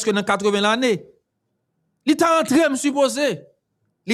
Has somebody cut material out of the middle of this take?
no; 0 cuts

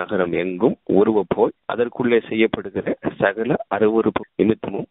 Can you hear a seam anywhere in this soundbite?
no; 0 cuts

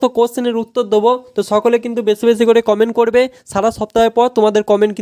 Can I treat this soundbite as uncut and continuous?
yes; 0 cuts

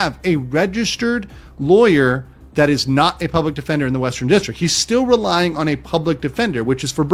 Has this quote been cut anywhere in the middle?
no; 0 cuts

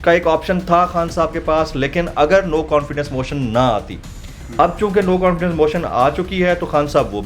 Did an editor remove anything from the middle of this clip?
no; 0 cuts

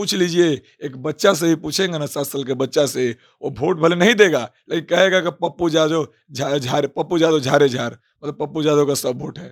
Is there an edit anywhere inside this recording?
no; 0 cuts

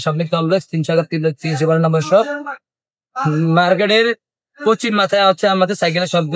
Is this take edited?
no; 0 cuts

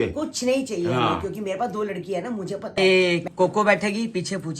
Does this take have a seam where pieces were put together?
yes; 1 cut; at 2.8 s

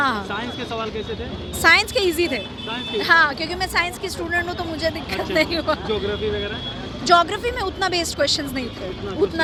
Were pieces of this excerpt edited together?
no; 0 cuts

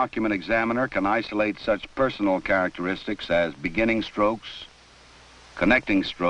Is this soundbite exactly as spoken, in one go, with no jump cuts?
no; 1 cut; at 2.0 s

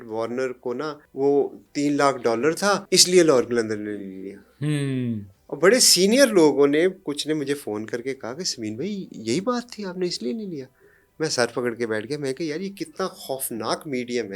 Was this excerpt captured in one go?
no; 2 cuts; at 1.0 s, 2.8 s

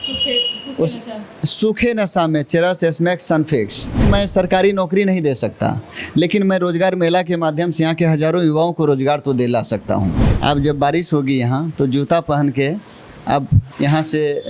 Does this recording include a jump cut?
yes; 2 cuts; at 4.1 s, 10.3 s

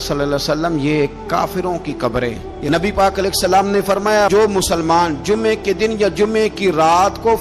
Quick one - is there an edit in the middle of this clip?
yes; 1 cut; at 2.5 s

